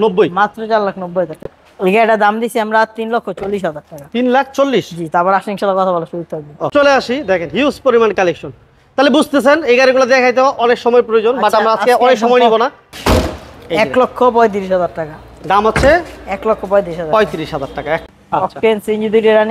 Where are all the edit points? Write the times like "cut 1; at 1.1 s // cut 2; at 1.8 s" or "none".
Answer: cut 1; at 1.4 s // cut 2; at 6.7 s // cut 3; at 12.8 s // cut 4; at 18.1 s